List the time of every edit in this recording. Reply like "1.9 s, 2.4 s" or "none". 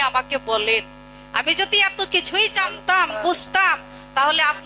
none

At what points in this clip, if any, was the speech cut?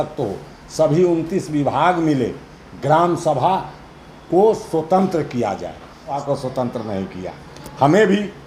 6.2 s

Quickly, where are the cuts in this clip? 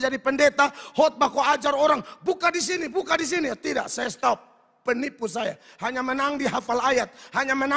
none

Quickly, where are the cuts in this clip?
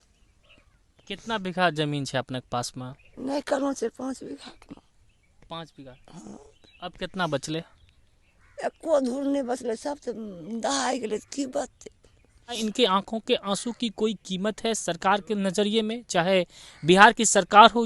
12.6 s

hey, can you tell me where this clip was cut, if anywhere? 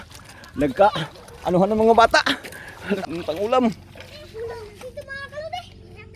3.0 s

